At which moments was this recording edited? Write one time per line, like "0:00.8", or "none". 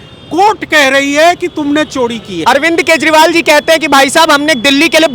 0:02.3